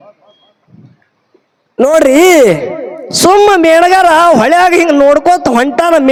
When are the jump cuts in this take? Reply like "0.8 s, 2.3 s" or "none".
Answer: none